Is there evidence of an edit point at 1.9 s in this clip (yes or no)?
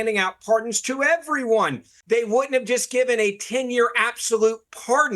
yes